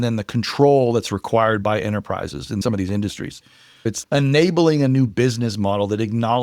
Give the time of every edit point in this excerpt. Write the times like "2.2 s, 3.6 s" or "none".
2.6 s, 3.8 s